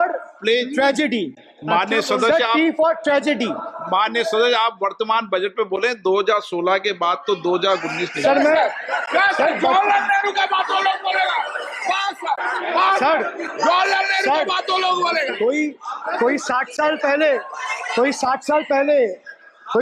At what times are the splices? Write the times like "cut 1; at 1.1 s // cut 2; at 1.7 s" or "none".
none

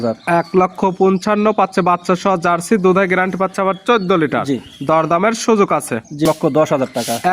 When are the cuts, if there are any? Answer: cut 1; at 6.2 s

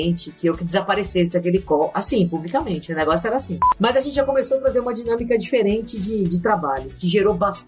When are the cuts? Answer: cut 1; at 3.6 s

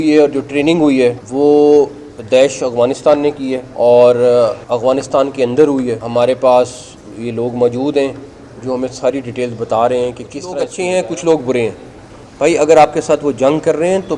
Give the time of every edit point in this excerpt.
cut 1; at 1.2 s // cut 2; at 3.6 s // cut 3; at 4.6 s // cut 4; at 6.0 s // cut 5; at 10.5 s

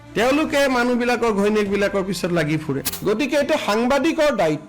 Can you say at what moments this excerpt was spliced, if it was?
cut 1; at 3.0 s

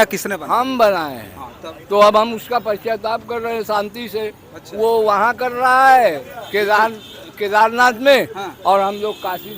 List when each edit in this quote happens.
cut 1; at 6.3 s

